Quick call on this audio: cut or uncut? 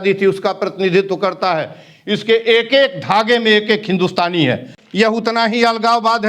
cut